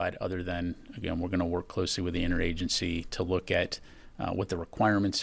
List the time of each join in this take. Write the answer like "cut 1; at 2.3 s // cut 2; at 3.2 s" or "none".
cut 1; at 3.4 s